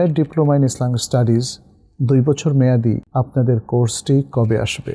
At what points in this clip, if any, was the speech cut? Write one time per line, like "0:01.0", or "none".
0:03.0